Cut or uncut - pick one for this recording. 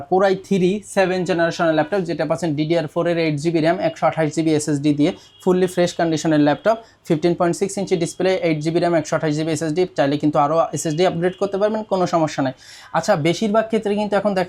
uncut